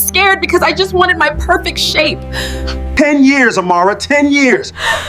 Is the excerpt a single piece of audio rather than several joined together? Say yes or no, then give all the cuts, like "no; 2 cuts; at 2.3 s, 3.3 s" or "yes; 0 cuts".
no; 1 cut; at 2.9 s